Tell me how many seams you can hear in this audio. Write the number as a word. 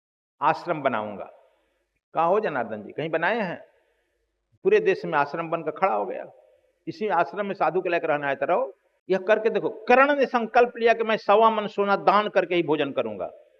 one